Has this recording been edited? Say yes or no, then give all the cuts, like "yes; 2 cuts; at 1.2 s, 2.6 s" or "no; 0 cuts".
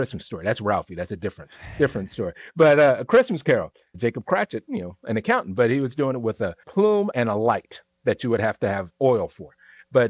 yes; 1 cut; at 7.1 s